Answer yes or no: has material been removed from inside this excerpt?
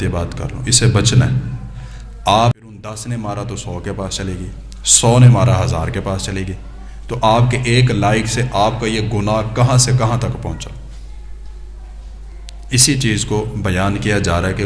yes